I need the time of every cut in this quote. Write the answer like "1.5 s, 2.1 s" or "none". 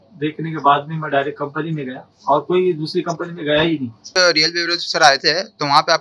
4.2 s